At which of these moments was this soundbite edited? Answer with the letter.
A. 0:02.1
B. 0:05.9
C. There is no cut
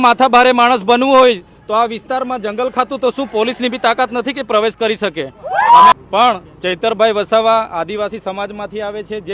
B